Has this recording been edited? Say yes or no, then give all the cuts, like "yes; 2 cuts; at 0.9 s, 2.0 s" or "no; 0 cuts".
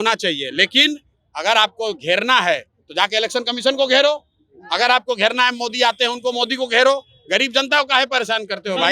no; 0 cuts